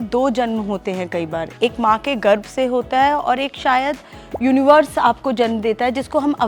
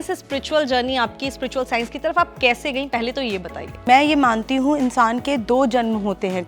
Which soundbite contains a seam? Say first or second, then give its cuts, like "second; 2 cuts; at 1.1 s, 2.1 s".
second; 1 cut; at 3.7 s